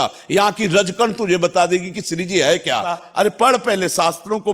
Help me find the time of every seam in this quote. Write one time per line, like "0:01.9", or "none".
0:03.0

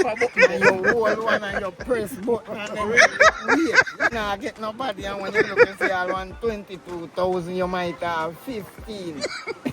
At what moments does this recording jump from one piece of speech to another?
0:04.1

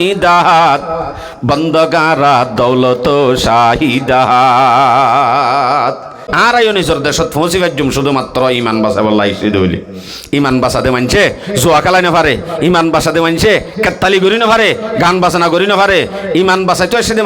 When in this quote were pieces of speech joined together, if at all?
0:06.2

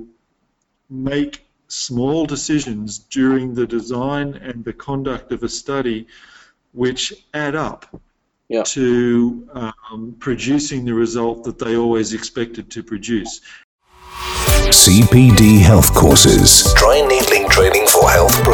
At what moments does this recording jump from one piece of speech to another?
0:13.7

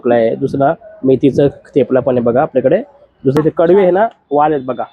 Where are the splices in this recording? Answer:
0:03.4

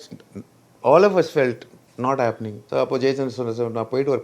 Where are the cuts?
0:02.5

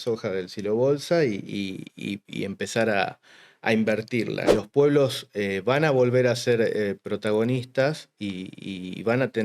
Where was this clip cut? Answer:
0:04.5

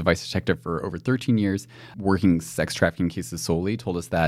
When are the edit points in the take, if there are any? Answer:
0:01.9

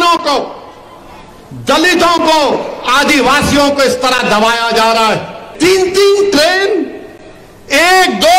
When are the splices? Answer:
0:05.5

